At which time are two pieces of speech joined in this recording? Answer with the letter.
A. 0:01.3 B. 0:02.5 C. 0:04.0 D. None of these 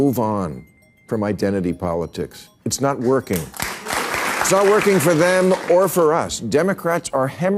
C